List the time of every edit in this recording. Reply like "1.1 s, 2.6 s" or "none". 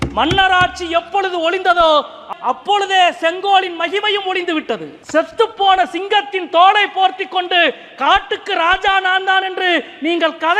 2.2 s, 4.9 s